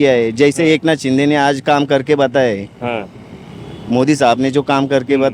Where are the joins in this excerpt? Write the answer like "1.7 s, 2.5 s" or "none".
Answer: none